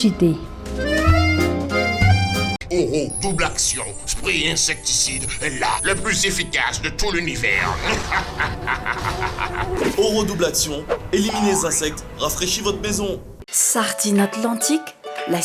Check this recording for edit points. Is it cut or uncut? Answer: uncut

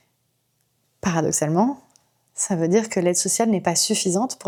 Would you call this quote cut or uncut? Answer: uncut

